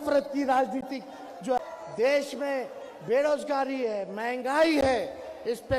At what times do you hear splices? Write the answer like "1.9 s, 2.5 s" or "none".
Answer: 1.6 s